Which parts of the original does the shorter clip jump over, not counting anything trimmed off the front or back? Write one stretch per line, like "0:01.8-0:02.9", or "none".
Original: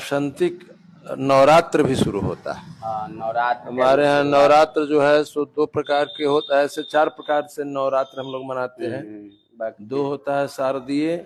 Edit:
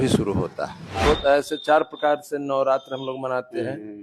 0:02.9-0:06.3